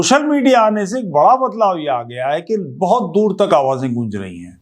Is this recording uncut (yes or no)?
yes